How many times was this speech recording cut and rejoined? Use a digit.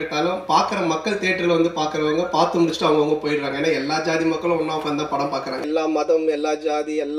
1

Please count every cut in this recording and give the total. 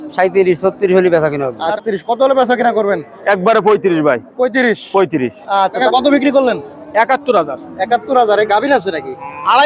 2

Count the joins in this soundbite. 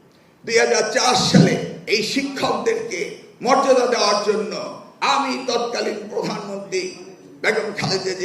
1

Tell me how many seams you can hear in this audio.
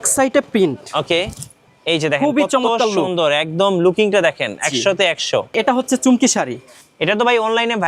1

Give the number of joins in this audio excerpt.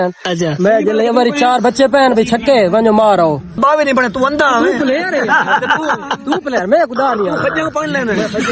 1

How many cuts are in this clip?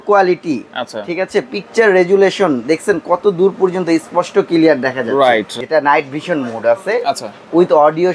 1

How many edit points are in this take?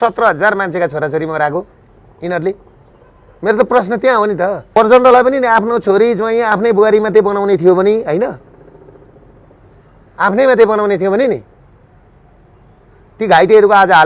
1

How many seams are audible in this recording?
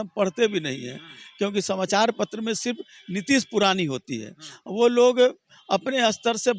0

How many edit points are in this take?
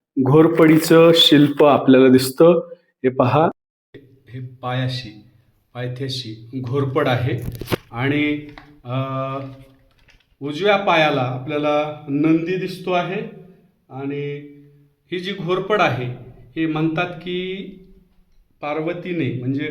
0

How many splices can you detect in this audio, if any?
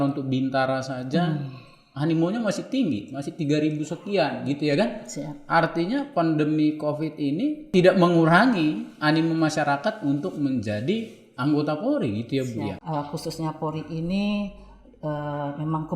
2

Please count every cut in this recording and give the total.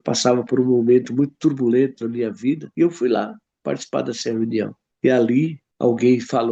3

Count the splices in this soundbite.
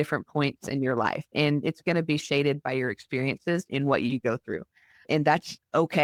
0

